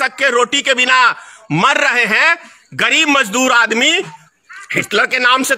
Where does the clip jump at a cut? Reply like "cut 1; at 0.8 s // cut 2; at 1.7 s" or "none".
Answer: cut 1; at 4.2 s